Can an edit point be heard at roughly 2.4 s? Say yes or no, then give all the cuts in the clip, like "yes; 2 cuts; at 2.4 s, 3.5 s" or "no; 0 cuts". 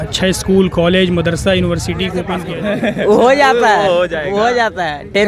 yes; 1 cut; at 2.4 s